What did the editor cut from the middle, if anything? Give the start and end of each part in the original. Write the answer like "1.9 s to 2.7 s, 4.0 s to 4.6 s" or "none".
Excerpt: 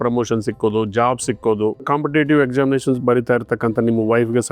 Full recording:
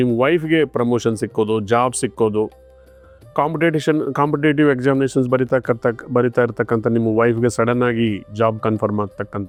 2.6 s to 4.1 s, 5.3 s to 6.1 s